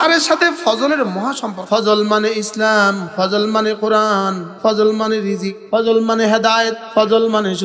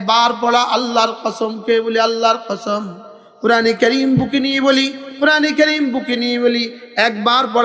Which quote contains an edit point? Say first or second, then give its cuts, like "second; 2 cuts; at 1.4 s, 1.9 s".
first; 5 cuts; at 1.5 s, 3.0 s, 4.4 s, 5.5 s, 6.8 s